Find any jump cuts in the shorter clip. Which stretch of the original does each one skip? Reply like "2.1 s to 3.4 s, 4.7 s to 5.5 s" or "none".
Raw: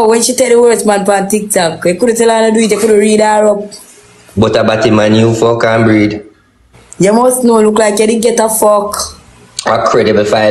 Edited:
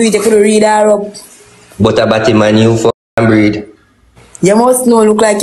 none